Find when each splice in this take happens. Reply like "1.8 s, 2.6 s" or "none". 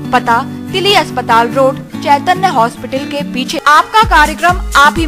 3.6 s